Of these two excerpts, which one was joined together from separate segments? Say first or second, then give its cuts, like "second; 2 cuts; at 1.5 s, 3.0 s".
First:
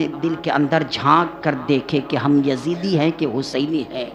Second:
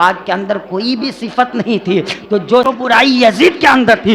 second; 1 cut; at 2.6 s